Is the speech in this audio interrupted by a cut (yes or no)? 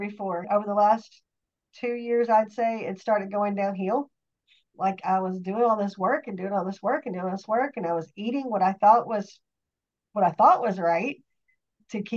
no